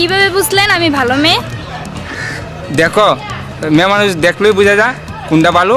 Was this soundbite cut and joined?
no; 0 cuts

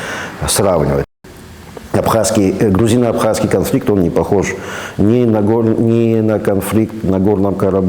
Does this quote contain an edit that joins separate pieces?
yes; 1 cut; at 1.1 s

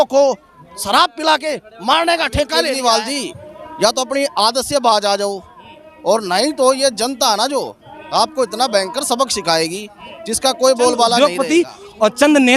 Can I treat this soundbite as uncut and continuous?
no; 2 cuts; at 2.8 s, 11.2 s

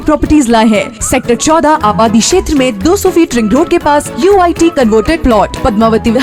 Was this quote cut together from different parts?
no; 0 cuts

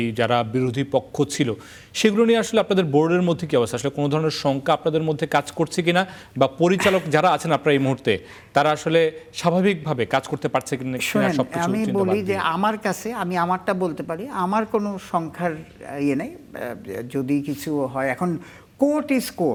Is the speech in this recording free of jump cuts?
yes; 0 cuts

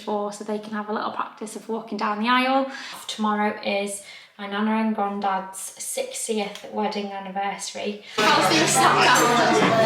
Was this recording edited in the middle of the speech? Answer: yes; 2 cuts; at 3.0 s, 8.2 s

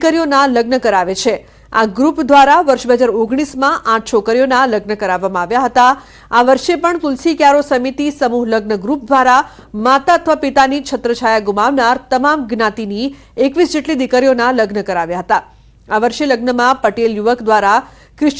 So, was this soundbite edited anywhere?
yes; 1 cut; at 4.2 s

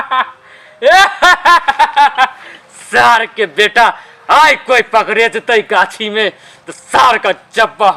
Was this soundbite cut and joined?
no; 0 cuts

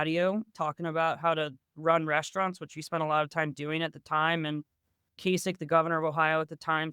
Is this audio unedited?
no; 1 cut; at 5.2 s

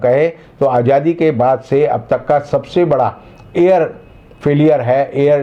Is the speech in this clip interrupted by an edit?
no; 0 cuts

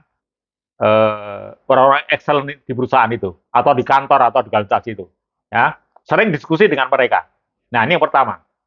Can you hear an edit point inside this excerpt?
no; 0 cuts

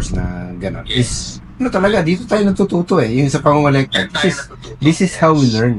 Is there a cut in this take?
no; 0 cuts

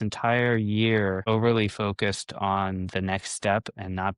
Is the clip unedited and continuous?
no; 1 cut; at 1.2 s

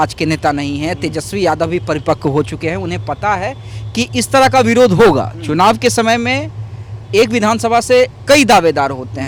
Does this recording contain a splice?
no; 0 cuts

